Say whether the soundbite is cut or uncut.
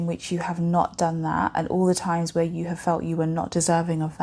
uncut